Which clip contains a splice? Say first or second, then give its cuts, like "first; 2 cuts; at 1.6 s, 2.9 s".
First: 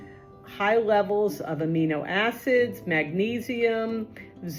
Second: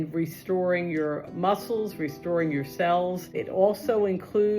second; 1 cut; at 3.4 s